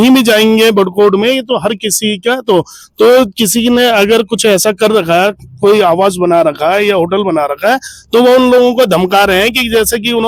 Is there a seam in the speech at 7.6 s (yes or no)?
no